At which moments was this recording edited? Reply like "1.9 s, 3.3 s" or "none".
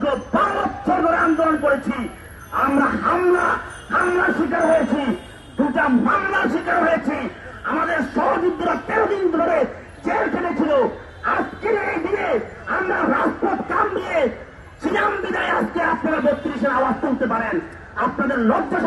none